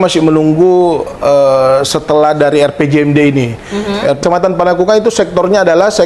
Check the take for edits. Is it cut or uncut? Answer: cut